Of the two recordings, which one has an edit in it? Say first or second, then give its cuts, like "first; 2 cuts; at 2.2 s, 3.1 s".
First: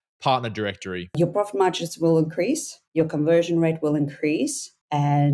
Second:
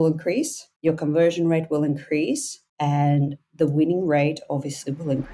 first; 1 cut; at 1.1 s